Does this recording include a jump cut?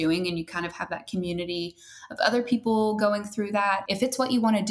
yes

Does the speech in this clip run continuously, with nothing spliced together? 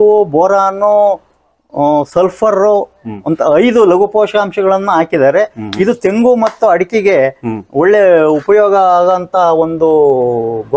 yes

